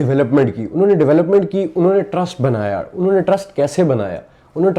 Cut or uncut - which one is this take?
uncut